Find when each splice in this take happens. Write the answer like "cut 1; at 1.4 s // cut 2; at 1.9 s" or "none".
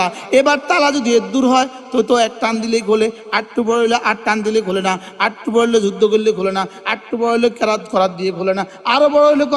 none